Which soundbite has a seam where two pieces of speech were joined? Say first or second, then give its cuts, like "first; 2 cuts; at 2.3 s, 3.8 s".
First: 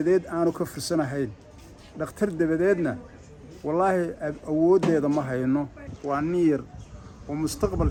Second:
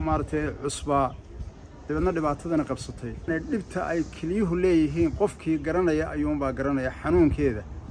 second; 1 cut; at 3.3 s